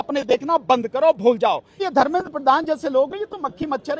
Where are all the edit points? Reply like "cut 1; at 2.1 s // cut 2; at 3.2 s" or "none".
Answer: cut 1; at 1.8 s